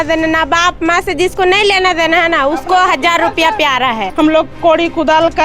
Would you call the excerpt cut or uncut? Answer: cut